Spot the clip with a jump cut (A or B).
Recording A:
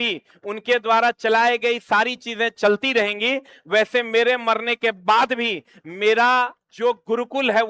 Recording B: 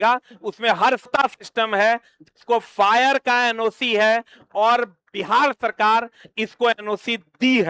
B